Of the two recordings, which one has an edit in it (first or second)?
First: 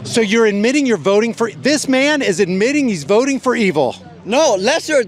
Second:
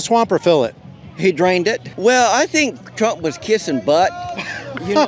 second